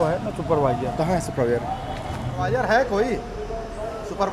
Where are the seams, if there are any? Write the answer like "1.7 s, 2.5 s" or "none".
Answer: 2.4 s